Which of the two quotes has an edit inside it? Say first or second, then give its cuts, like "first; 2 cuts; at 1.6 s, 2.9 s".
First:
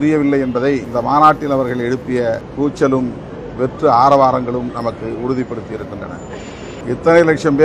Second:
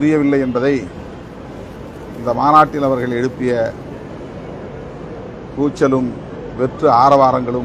first; 3 cuts; at 0.9 s, 2.5 s, 6.8 s